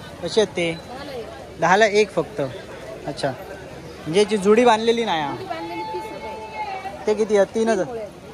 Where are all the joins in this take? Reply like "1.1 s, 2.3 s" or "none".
none